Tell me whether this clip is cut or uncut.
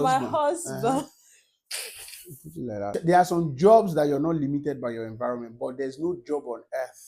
cut